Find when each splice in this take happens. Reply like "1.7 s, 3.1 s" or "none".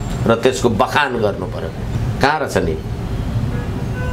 none